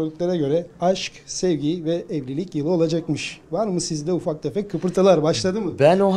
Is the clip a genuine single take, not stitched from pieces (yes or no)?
yes